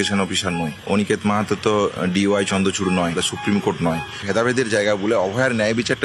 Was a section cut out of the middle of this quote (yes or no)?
yes